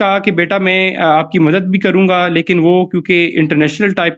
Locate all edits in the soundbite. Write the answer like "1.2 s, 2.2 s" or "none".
none